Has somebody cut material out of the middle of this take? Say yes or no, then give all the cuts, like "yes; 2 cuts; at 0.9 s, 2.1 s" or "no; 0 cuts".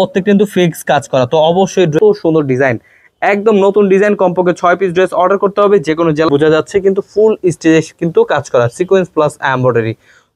yes; 2 cuts; at 2.0 s, 6.3 s